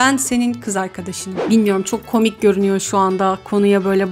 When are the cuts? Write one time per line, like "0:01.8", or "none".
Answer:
0:01.4

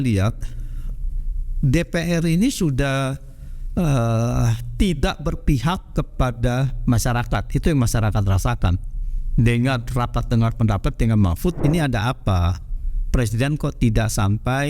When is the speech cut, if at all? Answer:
0:11.6

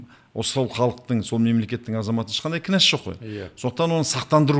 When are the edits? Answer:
none

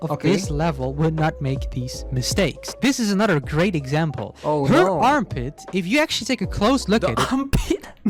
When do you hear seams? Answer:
none

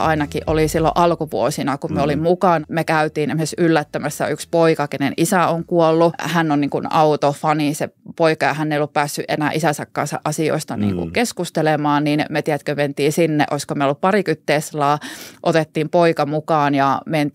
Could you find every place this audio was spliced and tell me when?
0:02.6
0:06.2

